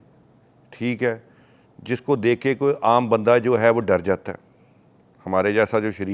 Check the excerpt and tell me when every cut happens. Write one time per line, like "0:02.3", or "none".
none